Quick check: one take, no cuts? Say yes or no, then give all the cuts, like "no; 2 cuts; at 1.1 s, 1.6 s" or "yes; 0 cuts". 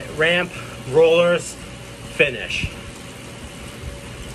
yes; 0 cuts